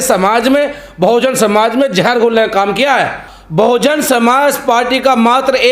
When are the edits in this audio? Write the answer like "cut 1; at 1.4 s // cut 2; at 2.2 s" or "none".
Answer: cut 1; at 3.3 s